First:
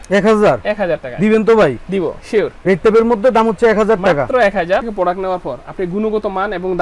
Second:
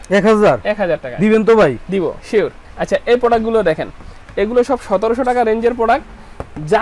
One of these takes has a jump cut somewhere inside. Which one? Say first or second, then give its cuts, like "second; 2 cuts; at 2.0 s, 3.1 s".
first; 2 cuts; at 2.5 s, 4.9 s